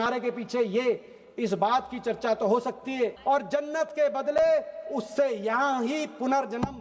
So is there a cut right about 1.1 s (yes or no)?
no